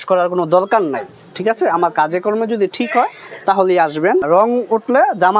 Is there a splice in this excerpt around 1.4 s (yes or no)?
no